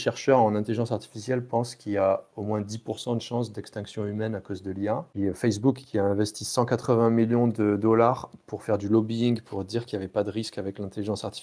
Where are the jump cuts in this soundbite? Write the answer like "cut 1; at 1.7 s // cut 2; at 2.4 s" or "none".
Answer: cut 1; at 5.1 s

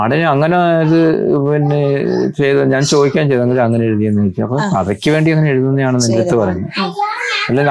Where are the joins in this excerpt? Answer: none

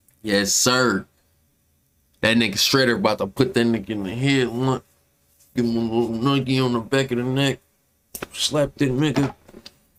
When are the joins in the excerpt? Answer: none

